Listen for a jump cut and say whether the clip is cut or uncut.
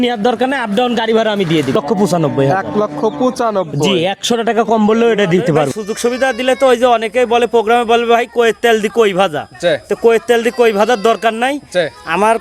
cut